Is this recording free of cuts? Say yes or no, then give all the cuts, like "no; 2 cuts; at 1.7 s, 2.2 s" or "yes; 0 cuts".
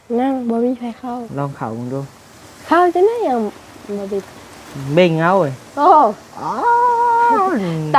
yes; 0 cuts